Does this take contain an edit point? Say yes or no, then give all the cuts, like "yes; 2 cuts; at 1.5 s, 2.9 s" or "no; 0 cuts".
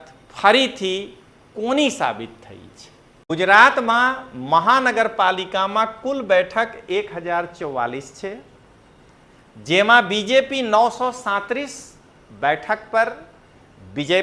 yes; 1 cut; at 3.3 s